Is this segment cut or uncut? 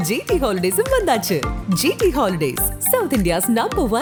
uncut